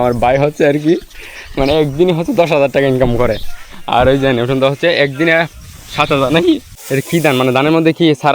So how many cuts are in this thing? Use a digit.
1